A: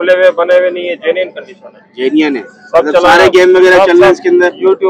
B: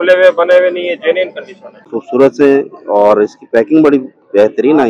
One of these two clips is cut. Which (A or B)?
B